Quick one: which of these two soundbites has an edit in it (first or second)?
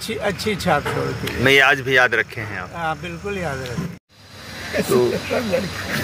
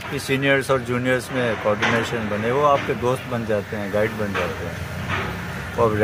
first